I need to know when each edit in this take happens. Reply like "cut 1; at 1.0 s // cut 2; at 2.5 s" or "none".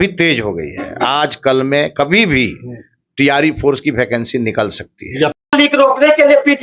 cut 1; at 5.3 s